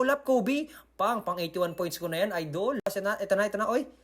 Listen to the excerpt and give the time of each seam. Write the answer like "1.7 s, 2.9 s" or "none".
2.9 s